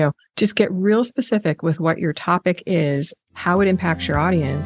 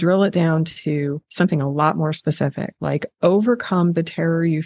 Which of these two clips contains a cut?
second; 2 cuts; at 1.2 s, 2.7 s

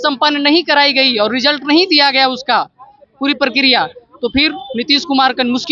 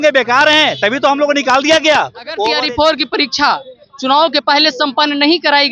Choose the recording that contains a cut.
second; 1 cut; at 2.5 s

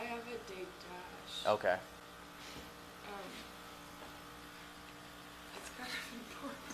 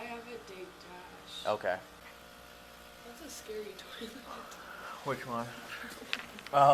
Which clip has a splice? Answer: second; 1 cut; at 2.0 s

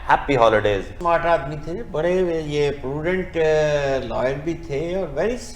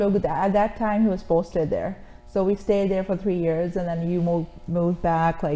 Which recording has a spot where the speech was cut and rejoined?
first; 1 cut; at 0.9 s

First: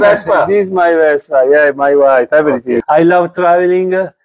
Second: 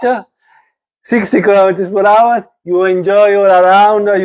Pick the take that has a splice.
first; 1 cut; at 2.8 s

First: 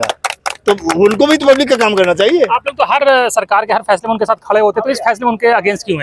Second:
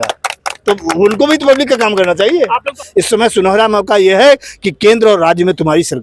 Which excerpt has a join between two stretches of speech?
second; 1 cut; at 2.7 s

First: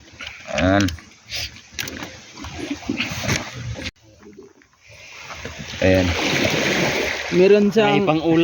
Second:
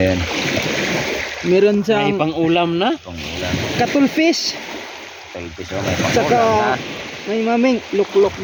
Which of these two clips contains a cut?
first; 1 cut; at 3.9 s

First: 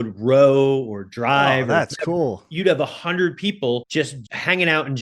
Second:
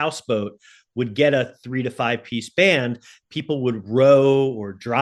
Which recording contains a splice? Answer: first; 2 cuts; at 2.5 s, 4.1 s

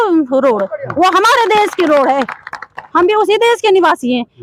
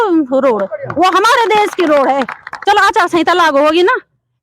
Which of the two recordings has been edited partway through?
second; 1 cut; at 2.5 s

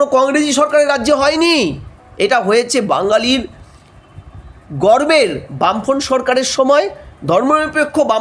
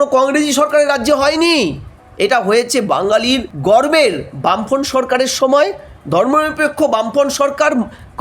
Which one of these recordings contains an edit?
second; 1 cut; at 3.5 s

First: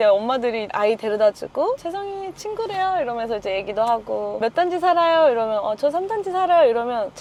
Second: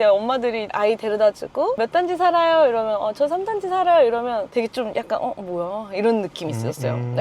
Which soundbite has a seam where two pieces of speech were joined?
second; 2 cuts; at 1.8 s, 4.5 s

